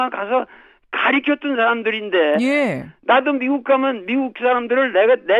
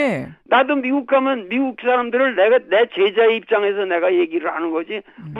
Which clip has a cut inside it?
first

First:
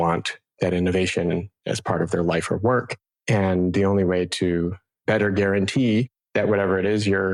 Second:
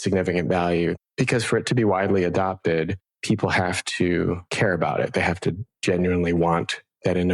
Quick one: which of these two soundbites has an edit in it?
second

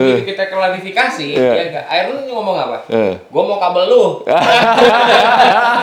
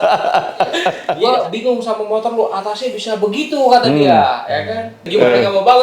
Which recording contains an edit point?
second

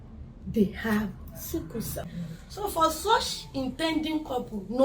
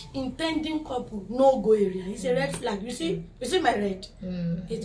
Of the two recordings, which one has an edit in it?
first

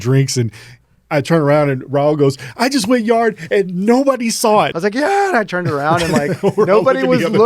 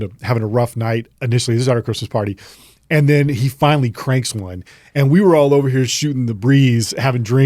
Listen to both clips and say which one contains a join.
first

